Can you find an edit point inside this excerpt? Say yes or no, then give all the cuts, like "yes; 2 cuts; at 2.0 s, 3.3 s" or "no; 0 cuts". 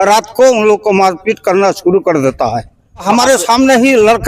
yes; 1 cut; at 3.0 s